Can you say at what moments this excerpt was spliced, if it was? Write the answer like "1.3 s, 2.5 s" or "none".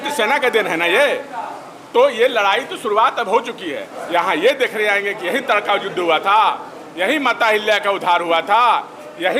3.9 s